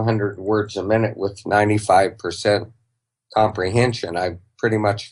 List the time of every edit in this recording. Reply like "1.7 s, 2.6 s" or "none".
none